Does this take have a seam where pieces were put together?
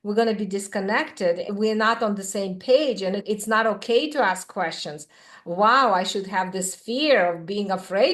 yes; 2 cuts; at 1.5 s, 3.2 s

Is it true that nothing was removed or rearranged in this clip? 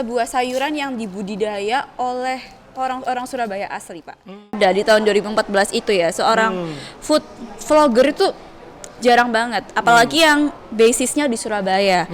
no; 1 cut; at 4.6 s

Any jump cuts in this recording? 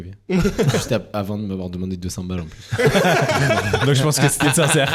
no; 0 cuts

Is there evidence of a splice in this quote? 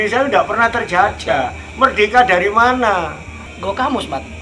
yes; 1 cut; at 3.5 s

